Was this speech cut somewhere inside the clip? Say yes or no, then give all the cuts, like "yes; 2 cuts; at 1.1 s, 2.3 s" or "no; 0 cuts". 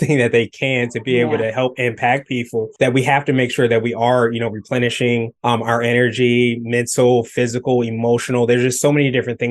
yes; 2 cuts; at 2.7 s, 5.3 s